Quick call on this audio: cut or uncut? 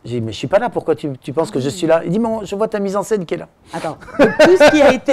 uncut